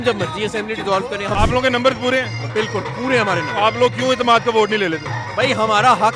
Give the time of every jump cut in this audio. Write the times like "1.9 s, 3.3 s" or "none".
1.4 s